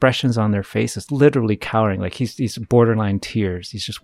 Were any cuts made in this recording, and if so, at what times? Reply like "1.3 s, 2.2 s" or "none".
1.0 s